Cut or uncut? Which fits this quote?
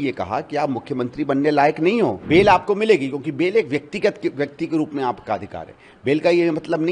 cut